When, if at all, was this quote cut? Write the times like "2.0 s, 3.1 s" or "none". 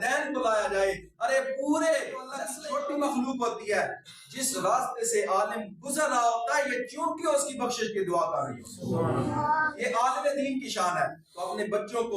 2.4 s